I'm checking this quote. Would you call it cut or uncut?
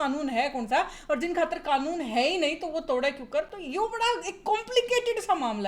uncut